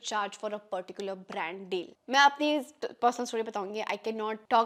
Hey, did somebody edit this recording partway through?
no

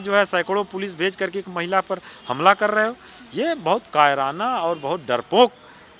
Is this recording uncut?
yes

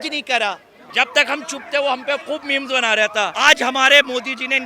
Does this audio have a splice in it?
yes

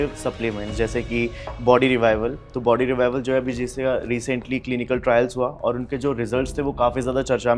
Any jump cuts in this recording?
no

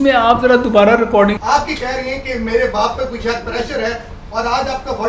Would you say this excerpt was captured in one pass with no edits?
no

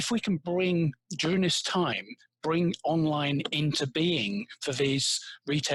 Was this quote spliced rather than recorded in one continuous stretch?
no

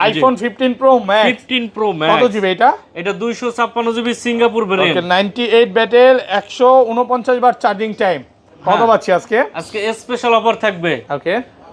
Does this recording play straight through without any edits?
yes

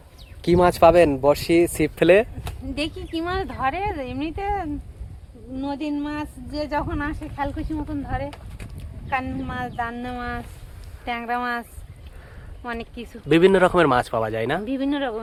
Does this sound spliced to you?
no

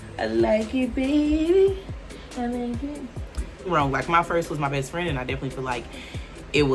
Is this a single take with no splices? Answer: no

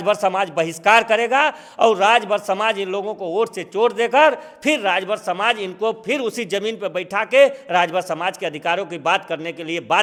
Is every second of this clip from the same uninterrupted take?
yes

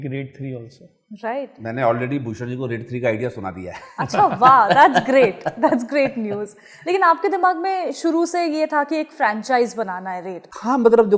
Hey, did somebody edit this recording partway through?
no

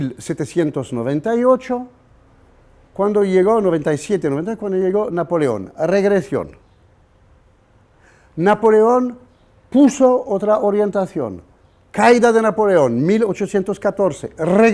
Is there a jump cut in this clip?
yes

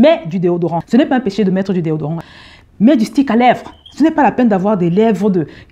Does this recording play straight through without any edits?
no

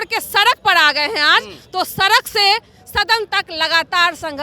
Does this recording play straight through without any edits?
yes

